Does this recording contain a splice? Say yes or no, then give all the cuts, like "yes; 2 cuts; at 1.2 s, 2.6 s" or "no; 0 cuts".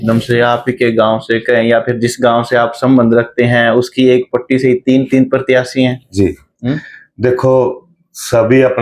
no; 0 cuts